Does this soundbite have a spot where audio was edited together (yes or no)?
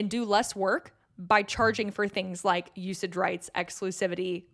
no